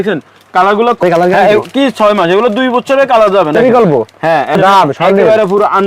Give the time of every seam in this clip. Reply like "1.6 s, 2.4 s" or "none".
1.0 s, 3.5 s, 4.6 s